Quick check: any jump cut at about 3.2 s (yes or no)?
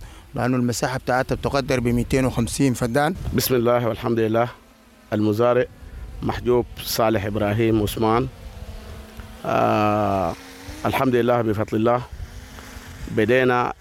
yes